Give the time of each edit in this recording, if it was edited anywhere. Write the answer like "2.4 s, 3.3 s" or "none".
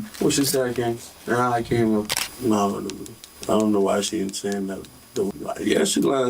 2.3 s, 5.3 s